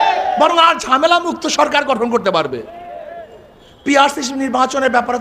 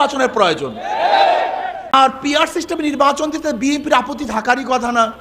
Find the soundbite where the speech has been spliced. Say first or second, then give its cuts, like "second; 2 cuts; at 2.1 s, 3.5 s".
second; 1 cut; at 1.9 s